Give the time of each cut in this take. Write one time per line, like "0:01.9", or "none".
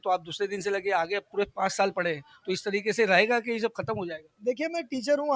none